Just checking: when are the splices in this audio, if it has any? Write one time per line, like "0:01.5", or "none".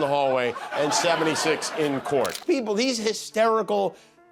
0:02.4